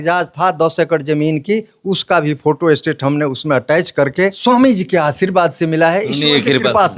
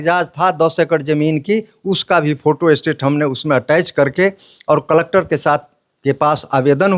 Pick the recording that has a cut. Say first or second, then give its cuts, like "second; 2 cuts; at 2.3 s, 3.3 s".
first; 1 cut; at 4.4 s